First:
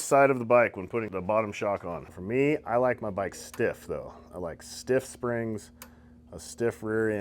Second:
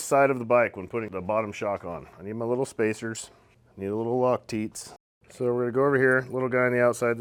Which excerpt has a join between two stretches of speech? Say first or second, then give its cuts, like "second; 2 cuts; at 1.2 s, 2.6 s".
first; 1 cut; at 2.1 s